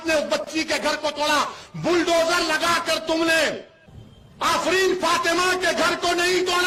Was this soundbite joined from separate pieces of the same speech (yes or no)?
no